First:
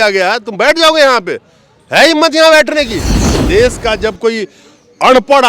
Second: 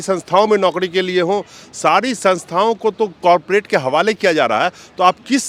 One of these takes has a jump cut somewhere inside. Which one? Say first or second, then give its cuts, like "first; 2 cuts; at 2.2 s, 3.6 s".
first; 1 cut; at 3.1 s